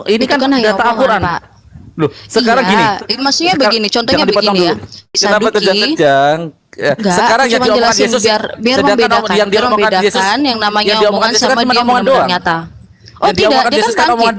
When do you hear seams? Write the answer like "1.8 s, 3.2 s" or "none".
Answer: 5.1 s